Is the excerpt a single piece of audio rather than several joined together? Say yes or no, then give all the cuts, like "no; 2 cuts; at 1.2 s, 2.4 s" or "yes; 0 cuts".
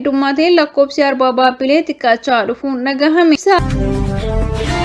no; 1 cut; at 3.6 s